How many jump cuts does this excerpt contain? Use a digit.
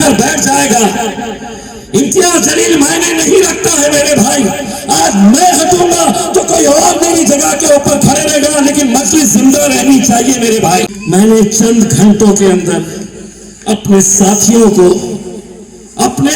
1